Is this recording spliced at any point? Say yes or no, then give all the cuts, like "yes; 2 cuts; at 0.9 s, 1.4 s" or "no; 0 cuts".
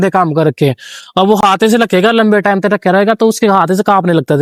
no; 0 cuts